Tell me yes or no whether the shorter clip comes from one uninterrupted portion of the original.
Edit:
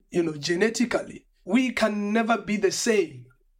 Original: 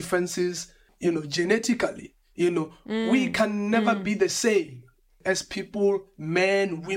no